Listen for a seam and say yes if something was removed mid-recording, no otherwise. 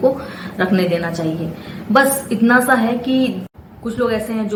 no